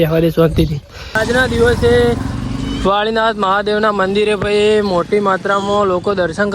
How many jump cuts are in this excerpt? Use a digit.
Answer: 1